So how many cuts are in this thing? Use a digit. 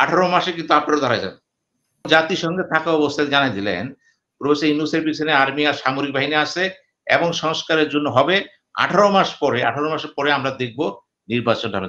1